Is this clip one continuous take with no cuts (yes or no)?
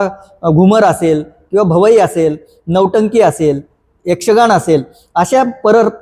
yes